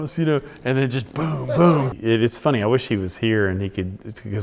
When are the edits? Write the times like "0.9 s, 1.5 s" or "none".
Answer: 2.0 s